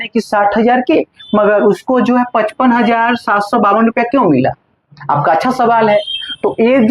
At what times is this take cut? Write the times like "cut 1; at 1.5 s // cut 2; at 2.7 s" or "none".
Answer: none